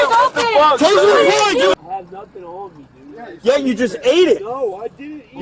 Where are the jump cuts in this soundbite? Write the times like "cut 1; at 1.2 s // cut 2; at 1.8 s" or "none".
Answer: cut 1; at 1.7 s